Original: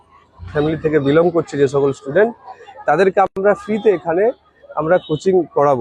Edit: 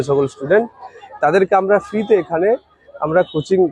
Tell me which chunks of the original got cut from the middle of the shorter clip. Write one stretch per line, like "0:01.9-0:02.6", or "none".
0:03.3-0:03.4